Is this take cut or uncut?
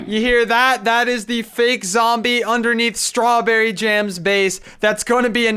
uncut